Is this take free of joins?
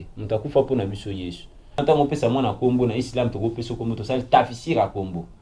no; 1 cut; at 1.8 s

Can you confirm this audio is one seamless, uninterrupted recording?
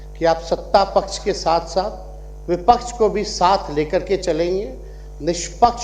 yes; 0 cuts

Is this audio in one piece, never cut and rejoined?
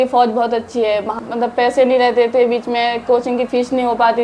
no; 1 cut; at 1.1 s

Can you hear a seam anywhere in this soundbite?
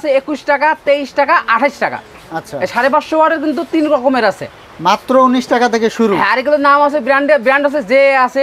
no; 0 cuts

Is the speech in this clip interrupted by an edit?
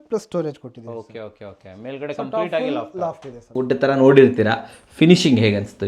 yes; 1 cut; at 3.6 s

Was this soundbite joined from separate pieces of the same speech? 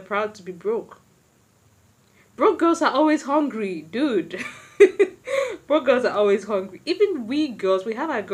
no; 0 cuts

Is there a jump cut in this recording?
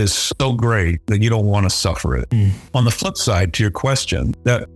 no; 0 cuts

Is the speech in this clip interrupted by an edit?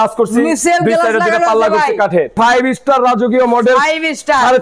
yes; 1 cut; at 2.3 s

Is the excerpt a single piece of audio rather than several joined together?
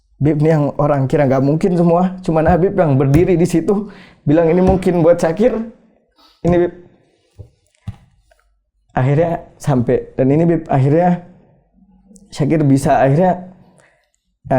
yes; 0 cuts

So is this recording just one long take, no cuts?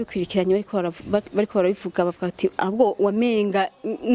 yes; 0 cuts

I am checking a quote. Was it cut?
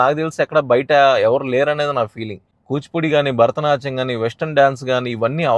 yes; 1 cut; at 2.5 s

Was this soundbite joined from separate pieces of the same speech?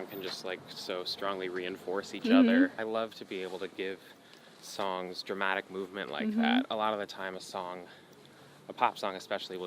yes; 1 cut; at 2.8 s

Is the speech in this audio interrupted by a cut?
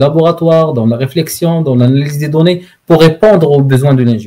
no; 0 cuts

